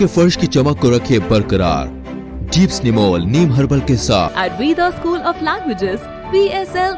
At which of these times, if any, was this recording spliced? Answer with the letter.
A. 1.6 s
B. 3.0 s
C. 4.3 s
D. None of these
C